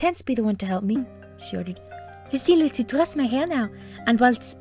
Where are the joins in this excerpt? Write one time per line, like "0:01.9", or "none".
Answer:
none